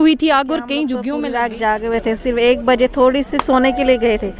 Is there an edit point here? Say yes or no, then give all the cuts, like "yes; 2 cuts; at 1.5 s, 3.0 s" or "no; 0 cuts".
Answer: yes; 1 cut; at 1.1 s